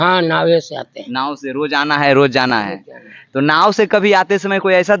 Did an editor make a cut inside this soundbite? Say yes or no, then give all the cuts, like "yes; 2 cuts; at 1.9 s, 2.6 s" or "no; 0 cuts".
no; 0 cuts